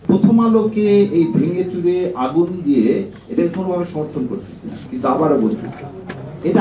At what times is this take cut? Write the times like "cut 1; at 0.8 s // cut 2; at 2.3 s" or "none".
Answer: none